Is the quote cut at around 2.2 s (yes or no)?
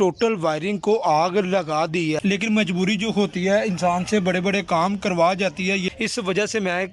yes